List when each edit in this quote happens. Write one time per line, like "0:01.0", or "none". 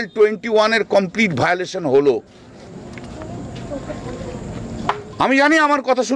none